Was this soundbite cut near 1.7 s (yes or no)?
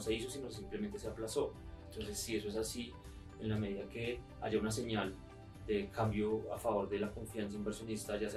no